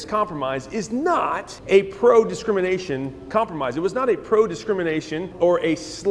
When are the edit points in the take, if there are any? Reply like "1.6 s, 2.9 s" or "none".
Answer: 1.5 s, 5.3 s